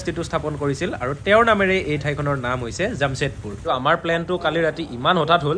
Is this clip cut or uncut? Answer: cut